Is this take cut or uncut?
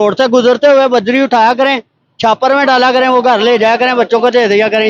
uncut